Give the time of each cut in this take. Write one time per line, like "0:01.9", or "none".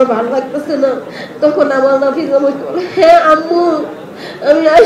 none